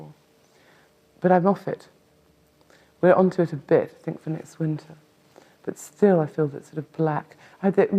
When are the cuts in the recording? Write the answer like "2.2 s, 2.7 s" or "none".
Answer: 4.2 s